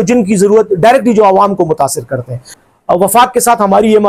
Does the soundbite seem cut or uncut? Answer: cut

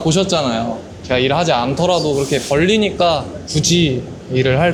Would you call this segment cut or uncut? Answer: uncut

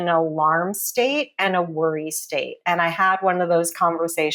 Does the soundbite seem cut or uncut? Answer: uncut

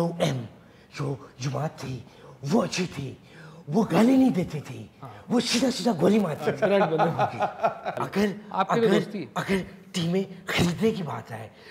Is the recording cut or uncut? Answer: cut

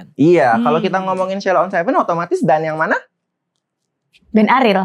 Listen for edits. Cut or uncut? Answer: uncut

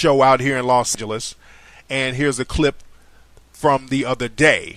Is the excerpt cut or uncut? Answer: uncut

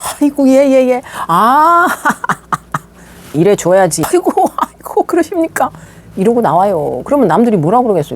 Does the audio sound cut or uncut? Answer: cut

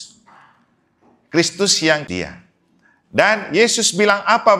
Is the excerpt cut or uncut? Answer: cut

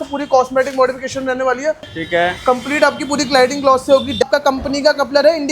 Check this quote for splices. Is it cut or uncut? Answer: cut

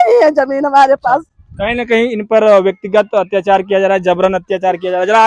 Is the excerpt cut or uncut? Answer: uncut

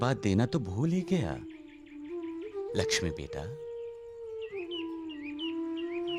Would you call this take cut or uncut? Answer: uncut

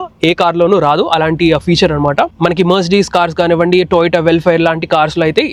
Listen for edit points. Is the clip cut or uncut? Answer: uncut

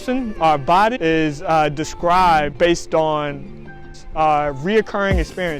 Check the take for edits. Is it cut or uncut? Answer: cut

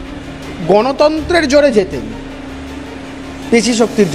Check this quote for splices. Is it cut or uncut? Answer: uncut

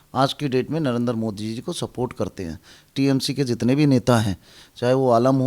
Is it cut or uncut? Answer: cut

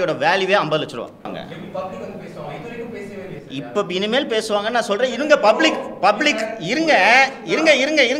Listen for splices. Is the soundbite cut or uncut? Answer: cut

